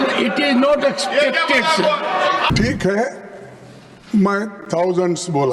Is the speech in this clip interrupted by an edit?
yes; 1 cut; at 2.5 s

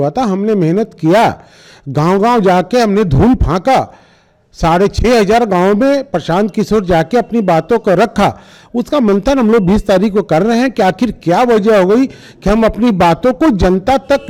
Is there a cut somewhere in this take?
no; 0 cuts

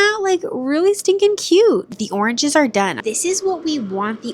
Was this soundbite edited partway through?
yes; 2 cuts; at 1.9 s, 3.0 s

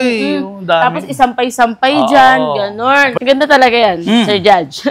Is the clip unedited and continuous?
no; 1 cut; at 3.1 s

